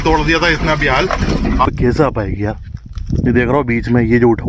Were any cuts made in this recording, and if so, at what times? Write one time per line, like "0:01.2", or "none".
0:01.6